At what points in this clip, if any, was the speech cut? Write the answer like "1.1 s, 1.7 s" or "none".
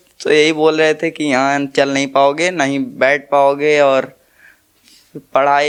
none